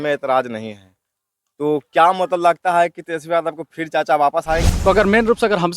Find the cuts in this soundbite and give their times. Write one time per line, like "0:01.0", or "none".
0:04.7